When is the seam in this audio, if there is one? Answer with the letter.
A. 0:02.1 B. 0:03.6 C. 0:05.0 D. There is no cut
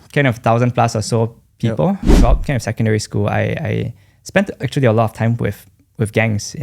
A